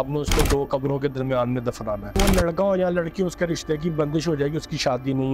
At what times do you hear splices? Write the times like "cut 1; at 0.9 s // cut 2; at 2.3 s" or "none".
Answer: cut 1; at 2.1 s